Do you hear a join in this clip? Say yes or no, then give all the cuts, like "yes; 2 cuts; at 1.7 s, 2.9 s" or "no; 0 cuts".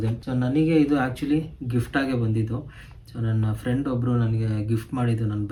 no; 0 cuts